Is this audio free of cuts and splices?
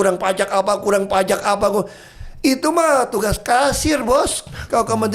yes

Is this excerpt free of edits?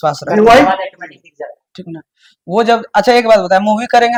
yes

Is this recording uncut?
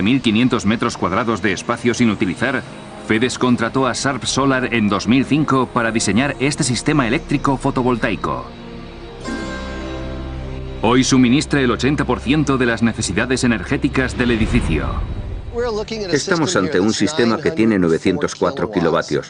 no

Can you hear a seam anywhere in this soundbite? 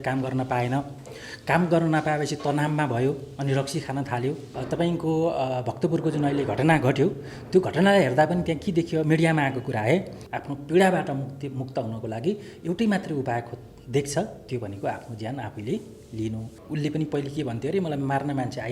yes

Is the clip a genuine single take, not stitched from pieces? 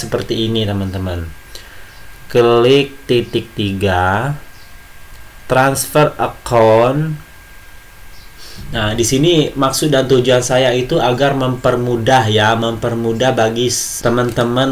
yes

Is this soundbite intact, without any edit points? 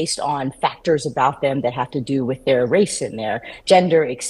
yes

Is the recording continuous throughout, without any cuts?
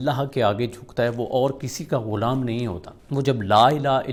yes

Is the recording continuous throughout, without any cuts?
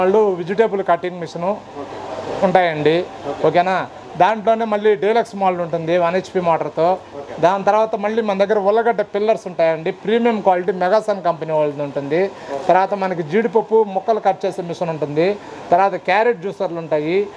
yes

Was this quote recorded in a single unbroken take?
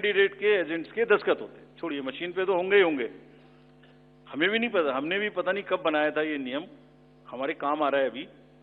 yes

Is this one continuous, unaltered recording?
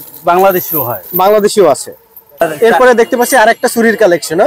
yes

